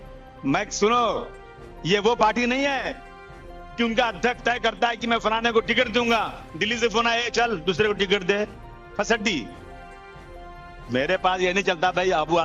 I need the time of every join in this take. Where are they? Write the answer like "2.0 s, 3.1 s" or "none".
9.5 s, 10.9 s